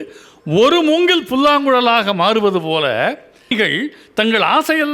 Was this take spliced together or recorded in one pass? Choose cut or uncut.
cut